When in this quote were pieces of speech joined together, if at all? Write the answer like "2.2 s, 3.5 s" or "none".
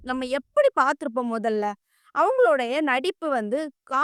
none